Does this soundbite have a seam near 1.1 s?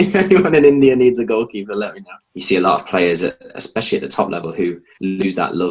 no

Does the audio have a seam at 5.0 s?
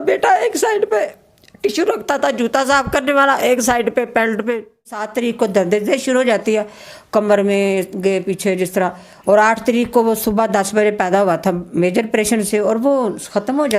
yes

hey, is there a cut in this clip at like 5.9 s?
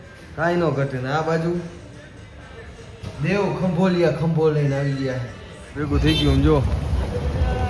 yes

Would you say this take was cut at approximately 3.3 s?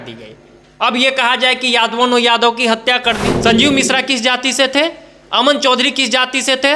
yes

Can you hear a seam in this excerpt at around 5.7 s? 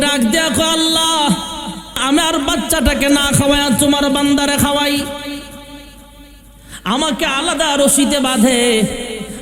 no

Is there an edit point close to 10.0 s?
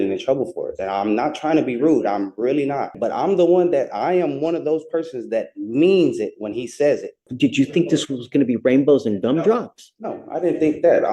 no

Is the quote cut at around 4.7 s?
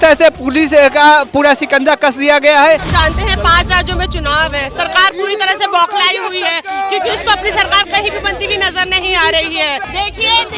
no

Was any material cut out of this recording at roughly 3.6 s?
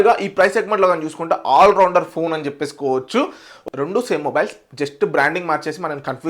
yes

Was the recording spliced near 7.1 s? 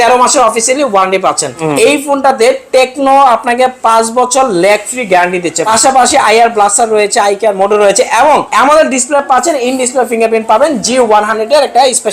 no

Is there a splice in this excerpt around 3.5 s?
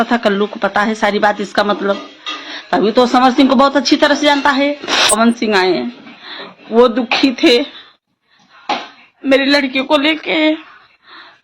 no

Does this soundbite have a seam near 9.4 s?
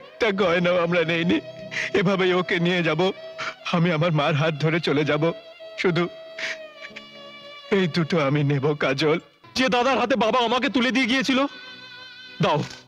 yes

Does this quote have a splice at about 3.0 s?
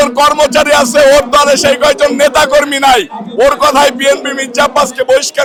no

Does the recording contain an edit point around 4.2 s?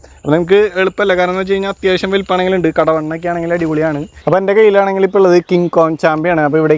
yes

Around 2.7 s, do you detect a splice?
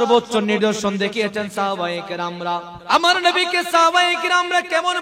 yes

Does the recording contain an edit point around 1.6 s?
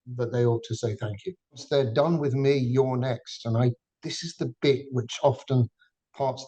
yes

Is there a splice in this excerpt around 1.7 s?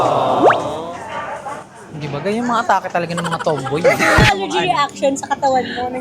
no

